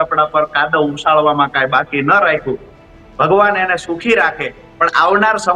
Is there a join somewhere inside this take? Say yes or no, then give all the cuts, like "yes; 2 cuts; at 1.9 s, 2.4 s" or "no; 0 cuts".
no; 0 cuts